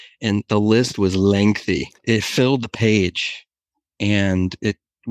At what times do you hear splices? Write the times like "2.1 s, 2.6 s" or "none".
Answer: 1.9 s